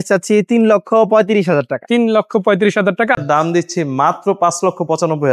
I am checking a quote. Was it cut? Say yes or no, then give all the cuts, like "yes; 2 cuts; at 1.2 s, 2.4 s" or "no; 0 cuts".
yes; 1 cut; at 3.2 s